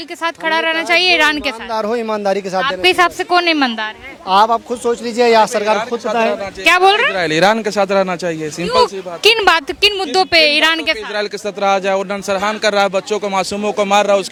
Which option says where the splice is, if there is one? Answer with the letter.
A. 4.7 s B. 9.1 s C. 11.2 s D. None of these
D